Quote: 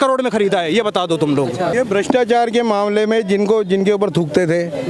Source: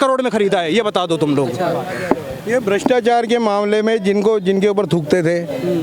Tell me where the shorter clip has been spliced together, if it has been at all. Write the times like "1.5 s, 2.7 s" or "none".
1.7 s